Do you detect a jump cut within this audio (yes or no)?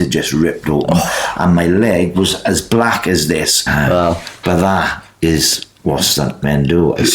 yes